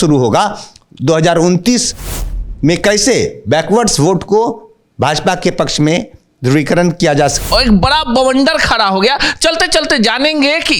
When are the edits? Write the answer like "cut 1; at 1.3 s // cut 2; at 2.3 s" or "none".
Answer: cut 1; at 7.4 s